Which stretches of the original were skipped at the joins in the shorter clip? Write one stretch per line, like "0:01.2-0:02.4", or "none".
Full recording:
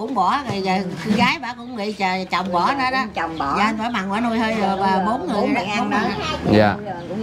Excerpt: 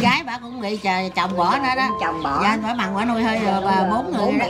none